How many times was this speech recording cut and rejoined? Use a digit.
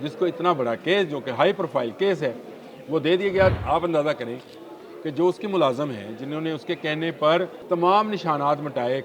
2